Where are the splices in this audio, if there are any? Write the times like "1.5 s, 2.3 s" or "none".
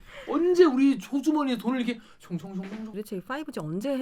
2.9 s